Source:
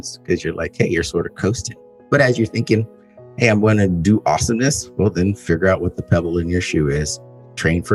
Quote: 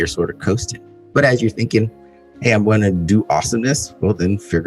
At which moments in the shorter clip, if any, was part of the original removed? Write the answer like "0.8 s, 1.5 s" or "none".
none